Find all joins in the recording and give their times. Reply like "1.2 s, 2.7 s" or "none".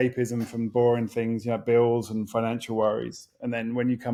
none